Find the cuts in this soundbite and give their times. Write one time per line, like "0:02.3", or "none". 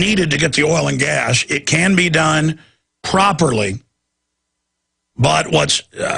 0:01.7